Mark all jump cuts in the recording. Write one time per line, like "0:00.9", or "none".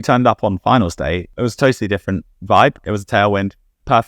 0:01.3
0:02.8